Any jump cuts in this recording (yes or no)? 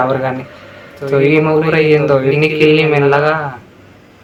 no